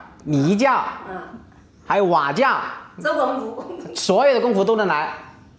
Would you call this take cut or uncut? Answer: uncut